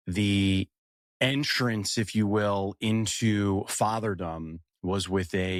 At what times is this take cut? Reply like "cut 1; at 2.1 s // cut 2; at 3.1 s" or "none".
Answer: none